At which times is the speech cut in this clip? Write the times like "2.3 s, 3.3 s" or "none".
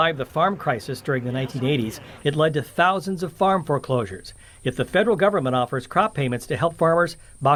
none